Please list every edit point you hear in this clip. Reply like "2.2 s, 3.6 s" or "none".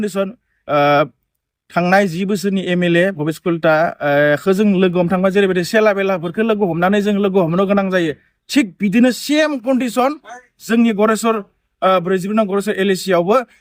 none